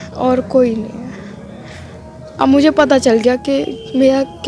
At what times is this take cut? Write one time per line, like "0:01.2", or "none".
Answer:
none